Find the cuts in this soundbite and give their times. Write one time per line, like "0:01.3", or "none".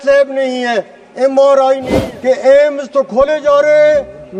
0:01.9